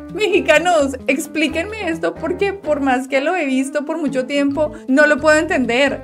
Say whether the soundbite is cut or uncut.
uncut